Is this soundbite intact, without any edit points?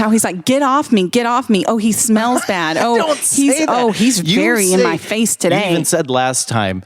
no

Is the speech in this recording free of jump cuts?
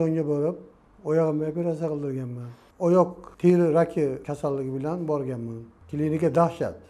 no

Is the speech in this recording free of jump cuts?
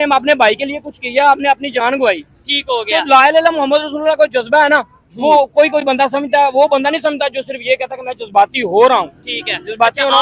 yes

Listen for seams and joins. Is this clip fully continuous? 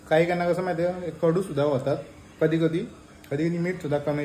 yes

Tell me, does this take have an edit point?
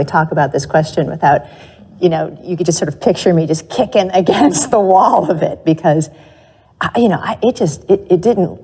no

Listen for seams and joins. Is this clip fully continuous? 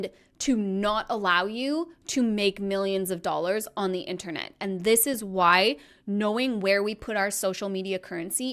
yes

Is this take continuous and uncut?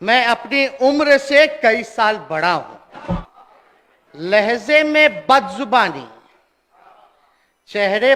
no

